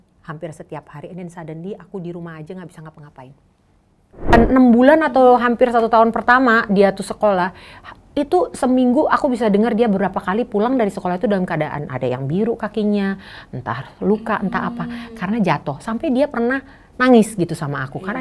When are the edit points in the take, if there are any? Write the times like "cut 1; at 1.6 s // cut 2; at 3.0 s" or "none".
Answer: cut 1; at 4.3 s